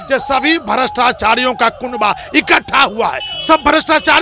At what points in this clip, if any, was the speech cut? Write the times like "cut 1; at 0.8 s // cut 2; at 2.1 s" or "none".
none